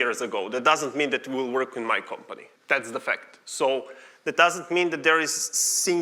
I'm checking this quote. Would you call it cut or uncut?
cut